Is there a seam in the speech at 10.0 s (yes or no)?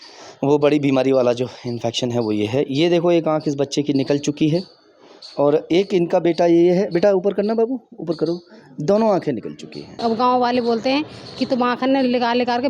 yes